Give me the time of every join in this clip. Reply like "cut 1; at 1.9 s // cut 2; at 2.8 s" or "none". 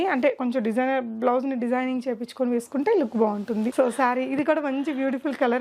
cut 1; at 3.7 s